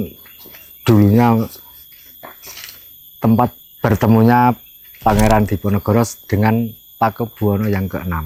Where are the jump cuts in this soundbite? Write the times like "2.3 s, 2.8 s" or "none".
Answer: none